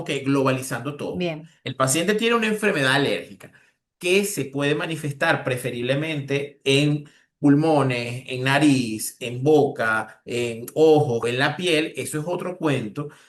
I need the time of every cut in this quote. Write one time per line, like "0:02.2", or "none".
0:11.2

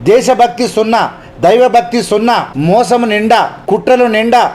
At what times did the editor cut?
0:02.5
0:03.6

